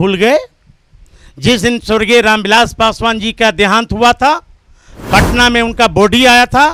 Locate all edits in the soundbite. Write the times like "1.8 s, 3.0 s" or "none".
none